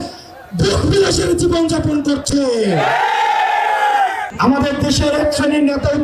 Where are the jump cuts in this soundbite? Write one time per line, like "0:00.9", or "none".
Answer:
0:04.3